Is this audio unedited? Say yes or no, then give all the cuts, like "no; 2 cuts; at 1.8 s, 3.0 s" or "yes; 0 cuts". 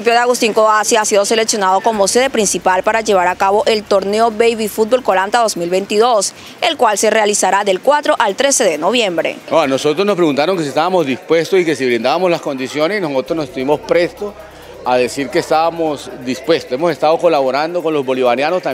no; 1 cut; at 9.4 s